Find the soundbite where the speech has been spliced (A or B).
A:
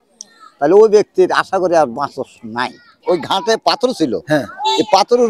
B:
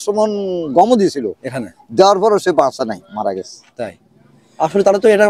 A